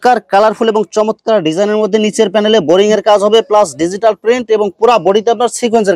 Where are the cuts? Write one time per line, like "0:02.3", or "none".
none